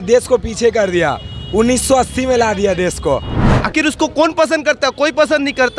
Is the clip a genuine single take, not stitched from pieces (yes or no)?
no